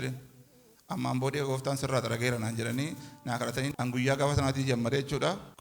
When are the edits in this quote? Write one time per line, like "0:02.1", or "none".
0:03.7